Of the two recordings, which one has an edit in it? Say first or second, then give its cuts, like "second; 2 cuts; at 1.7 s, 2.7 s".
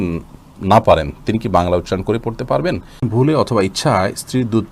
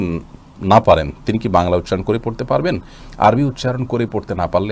first; 1 cut; at 3.1 s